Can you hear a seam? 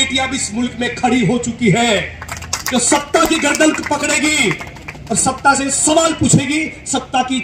no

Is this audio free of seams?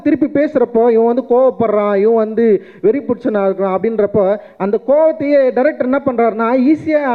yes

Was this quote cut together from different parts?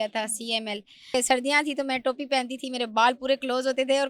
yes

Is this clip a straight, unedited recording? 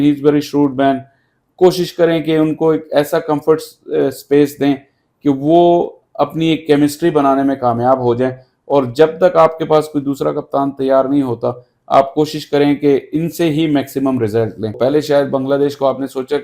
no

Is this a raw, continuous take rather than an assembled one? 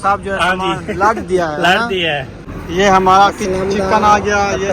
no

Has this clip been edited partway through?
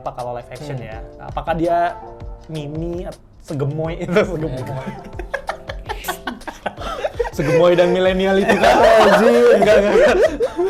no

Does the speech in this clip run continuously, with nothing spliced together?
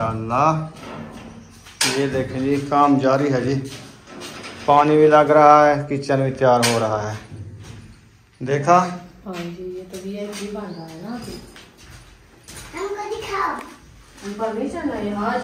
yes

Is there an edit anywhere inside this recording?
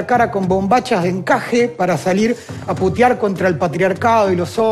no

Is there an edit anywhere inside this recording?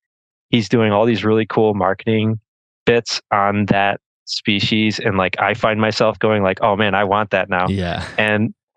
no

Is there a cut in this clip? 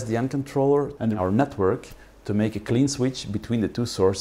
yes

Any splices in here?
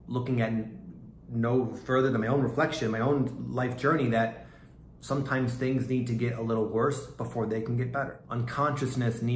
yes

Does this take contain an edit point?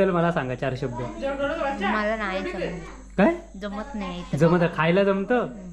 no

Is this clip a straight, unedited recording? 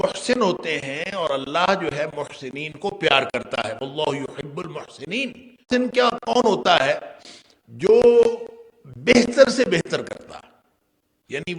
no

